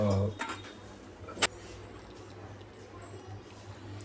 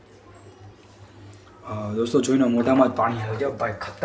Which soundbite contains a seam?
first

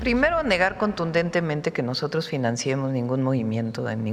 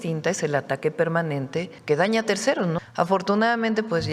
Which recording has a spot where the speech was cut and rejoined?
second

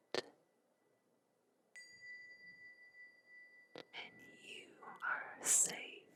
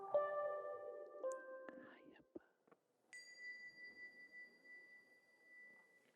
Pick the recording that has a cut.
second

